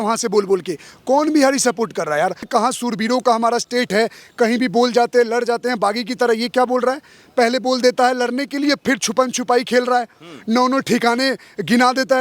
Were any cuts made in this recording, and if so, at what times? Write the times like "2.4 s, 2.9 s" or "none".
2.4 s